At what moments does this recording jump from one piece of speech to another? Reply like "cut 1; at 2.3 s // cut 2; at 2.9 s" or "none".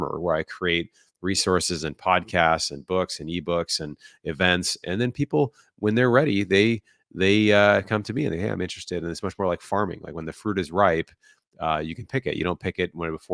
none